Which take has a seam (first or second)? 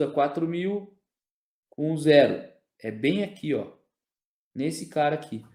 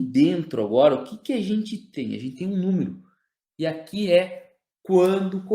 second